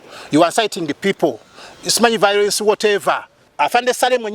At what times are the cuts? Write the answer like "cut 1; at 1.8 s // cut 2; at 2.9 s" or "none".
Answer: cut 1; at 3.4 s